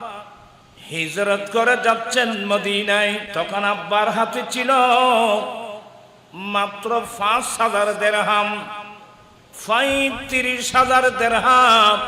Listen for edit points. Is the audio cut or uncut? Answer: cut